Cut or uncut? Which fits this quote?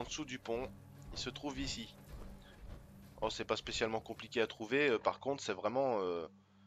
uncut